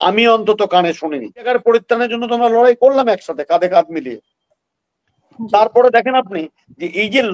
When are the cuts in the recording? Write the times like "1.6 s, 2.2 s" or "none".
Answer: 1.5 s